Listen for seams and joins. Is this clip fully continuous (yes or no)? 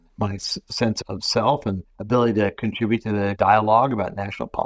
yes